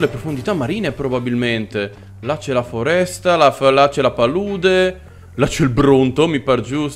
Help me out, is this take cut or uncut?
uncut